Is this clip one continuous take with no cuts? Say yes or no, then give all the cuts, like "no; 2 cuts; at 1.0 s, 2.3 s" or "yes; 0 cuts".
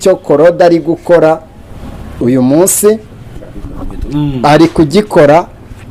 yes; 0 cuts